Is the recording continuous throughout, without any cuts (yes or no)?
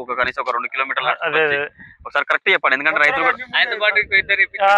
yes